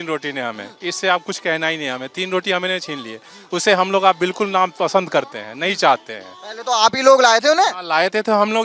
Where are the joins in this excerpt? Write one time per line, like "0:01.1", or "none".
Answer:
none